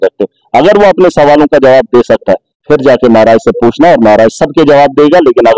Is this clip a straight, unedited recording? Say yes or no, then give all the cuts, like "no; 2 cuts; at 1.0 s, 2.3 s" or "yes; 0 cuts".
yes; 0 cuts